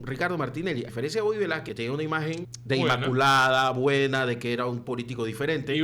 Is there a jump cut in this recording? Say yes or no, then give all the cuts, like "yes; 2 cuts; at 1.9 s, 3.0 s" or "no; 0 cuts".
yes; 3 cuts; at 0.9 s, 1.7 s, 2.5 s